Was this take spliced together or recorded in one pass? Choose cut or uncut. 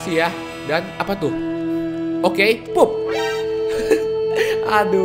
uncut